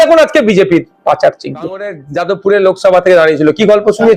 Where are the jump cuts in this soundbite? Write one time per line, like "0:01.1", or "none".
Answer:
0:02.0